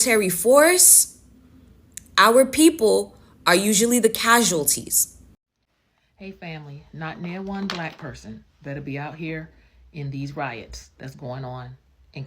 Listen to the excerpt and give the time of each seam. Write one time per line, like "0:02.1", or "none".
0:05.3

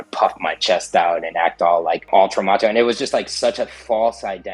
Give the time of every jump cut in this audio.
0:02.1

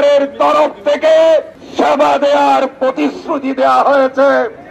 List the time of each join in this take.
0:01.6

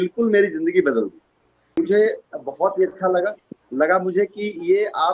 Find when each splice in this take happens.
0:01.7

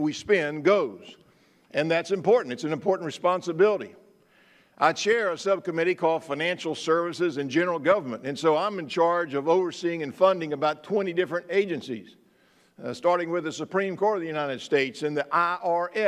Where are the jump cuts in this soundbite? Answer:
0:06.6

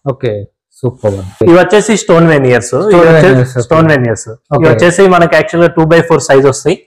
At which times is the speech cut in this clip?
0:01.4

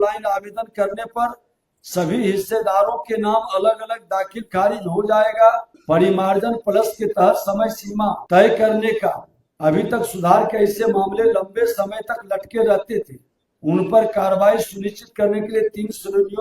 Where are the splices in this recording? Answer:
0:05.7
0:08.2

